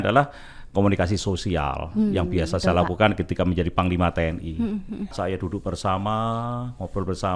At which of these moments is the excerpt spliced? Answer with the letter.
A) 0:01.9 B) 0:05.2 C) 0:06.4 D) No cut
B